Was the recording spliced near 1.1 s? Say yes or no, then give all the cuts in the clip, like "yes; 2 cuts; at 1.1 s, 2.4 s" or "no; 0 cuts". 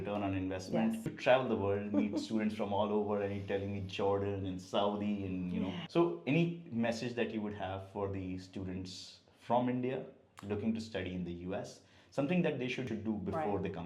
yes; 3 cuts; at 1.1 s, 5.8 s, 12.9 s